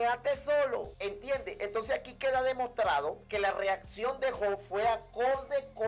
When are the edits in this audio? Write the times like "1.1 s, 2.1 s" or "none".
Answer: 0.9 s, 3.2 s